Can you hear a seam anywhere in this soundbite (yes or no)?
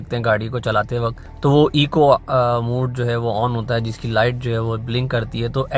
yes